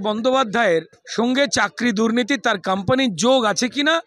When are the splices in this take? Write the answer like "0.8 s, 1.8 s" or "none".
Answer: 1.0 s